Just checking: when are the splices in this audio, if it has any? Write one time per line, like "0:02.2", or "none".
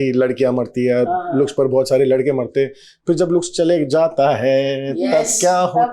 none